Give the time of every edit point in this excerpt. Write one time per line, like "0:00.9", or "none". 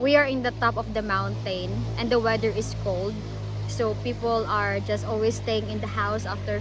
none